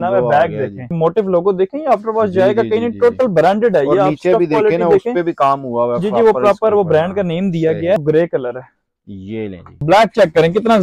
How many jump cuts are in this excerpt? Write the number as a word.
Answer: three